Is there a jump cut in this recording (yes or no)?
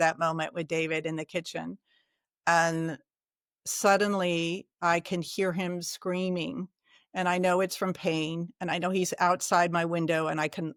no